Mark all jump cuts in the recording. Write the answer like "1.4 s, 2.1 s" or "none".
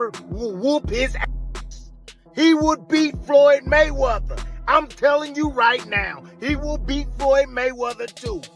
none

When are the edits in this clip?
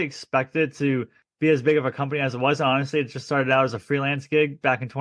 1.2 s

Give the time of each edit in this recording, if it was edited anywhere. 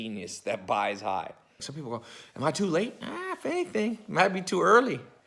1.7 s

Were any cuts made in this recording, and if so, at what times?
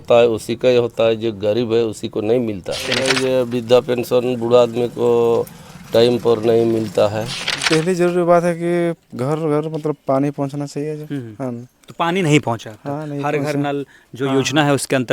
2.9 s, 7.5 s

